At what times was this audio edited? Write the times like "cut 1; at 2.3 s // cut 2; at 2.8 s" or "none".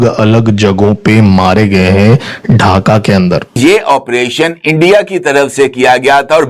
cut 1; at 3.6 s